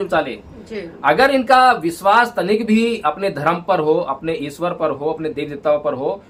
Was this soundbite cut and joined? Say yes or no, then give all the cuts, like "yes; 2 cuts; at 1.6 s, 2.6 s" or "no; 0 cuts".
no; 0 cuts